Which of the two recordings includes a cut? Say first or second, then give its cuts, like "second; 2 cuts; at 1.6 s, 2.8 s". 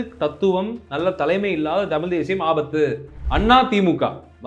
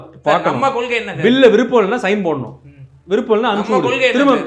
first; 1 cut; at 3.1 s